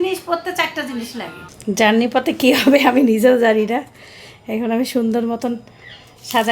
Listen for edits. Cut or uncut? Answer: cut